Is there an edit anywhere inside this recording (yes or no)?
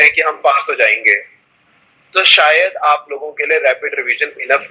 no